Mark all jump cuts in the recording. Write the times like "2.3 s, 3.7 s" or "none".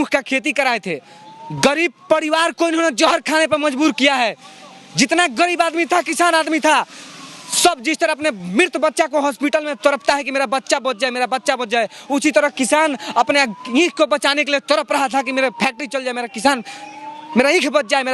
none